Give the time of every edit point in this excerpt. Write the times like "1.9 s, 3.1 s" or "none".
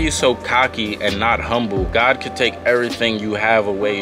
none